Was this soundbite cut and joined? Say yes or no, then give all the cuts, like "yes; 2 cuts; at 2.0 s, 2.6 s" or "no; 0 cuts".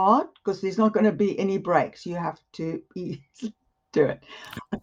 no; 0 cuts